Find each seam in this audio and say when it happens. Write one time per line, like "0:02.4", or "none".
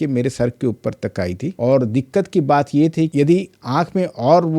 0:01.5
0:03.1